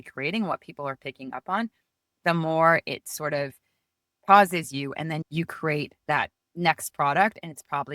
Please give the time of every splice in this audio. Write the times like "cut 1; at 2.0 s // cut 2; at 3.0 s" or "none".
cut 1; at 5.3 s

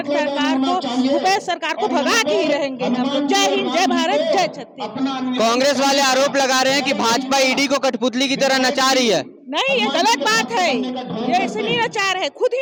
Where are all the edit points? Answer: none

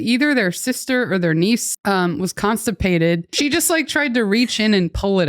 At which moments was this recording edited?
cut 1; at 1.7 s // cut 2; at 3.3 s

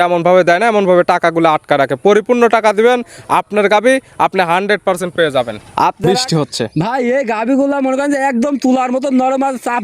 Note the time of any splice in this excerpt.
cut 1; at 6.0 s

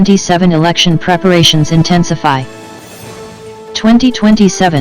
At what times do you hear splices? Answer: cut 1; at 2.5 s // cut 2; at 3.8 s

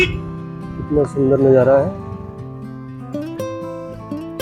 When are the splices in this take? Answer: cut 1; at 2.5 s

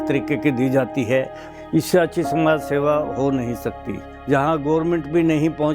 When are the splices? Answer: cut 1; at 1.4 s // cut 2; at 4.0 s

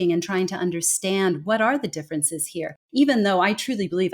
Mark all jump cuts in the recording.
cut 1; at 2.8 s

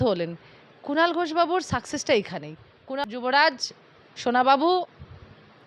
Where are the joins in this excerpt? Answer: cut 1; at 3.1 s

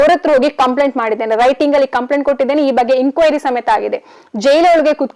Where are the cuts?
none

